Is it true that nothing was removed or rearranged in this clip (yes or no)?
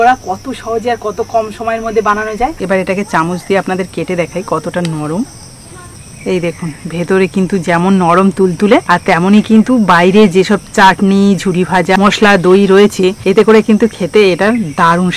no